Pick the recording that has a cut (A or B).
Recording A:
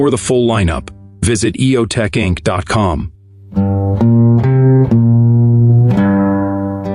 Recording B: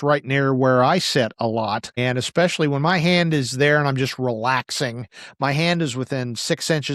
B